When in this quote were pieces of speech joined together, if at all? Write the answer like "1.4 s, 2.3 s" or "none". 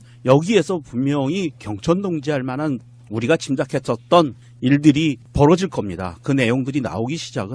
none

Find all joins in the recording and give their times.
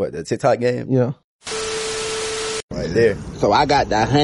1.4 s, 2.7 s

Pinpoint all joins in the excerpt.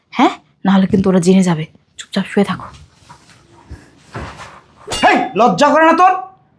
4.8 s

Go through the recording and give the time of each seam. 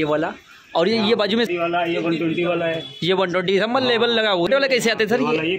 1.5 s, 4.5 s

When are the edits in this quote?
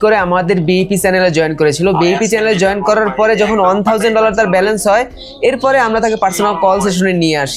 none

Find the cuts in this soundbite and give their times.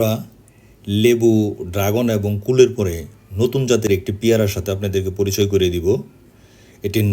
none

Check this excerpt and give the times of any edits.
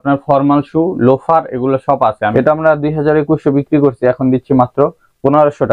2.3 s

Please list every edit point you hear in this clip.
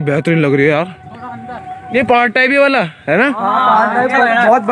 1.9 s

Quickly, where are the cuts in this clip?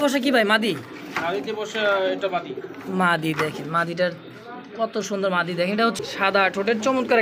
6.0 s

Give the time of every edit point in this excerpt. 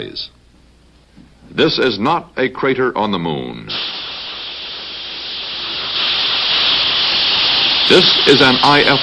4.8 s

